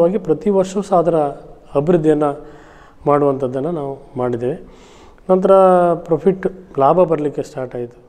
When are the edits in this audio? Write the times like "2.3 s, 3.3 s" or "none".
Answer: none

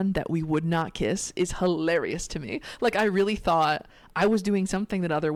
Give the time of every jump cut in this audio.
none

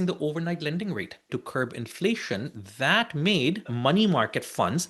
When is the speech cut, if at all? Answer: 1.3 s, 3.7 s

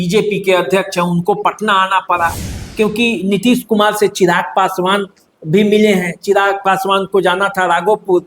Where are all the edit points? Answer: 2.6 s

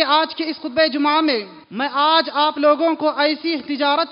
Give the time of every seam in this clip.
1.6 s

